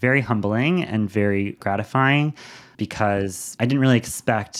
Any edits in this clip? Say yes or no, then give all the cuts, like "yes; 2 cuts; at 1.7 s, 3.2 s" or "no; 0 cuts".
no; 0 cuts